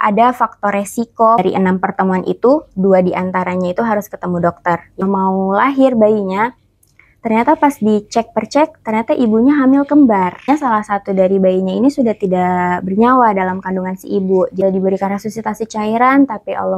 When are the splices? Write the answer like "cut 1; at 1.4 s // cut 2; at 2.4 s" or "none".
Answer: cut 1; at 1.4 s // cut 2; at 5.0 s // cut 3; at 10.4 s // cut 4; at 14.6 s